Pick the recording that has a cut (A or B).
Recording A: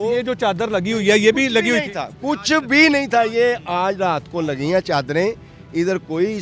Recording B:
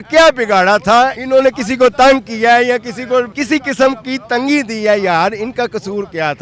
B